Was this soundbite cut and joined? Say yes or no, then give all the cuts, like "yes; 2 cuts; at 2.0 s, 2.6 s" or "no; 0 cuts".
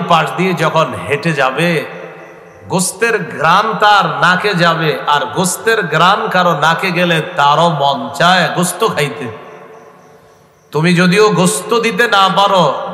no; 0 cuts